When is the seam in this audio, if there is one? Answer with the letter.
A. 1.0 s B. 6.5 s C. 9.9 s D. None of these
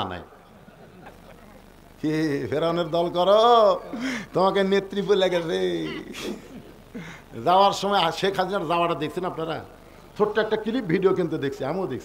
A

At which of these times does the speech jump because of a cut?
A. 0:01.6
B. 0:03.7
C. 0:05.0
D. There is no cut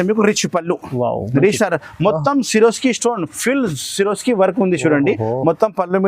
A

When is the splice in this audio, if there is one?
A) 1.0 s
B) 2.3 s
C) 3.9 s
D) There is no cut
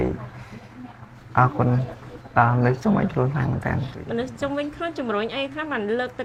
D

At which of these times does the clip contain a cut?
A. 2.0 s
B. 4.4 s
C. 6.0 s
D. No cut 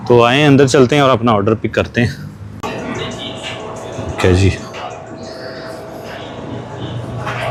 D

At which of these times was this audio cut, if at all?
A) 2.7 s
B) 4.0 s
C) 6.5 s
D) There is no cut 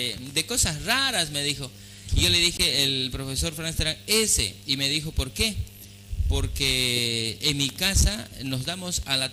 C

